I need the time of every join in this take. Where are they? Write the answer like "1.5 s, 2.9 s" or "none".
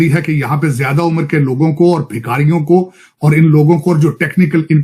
none